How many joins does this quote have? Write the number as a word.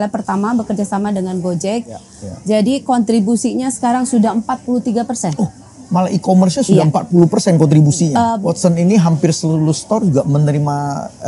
two